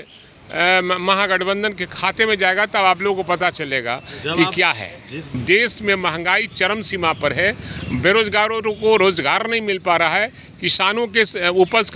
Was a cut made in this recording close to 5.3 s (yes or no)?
yes